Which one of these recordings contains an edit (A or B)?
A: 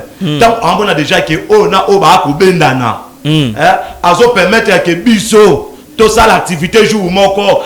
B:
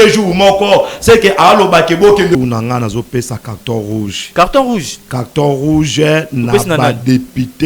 B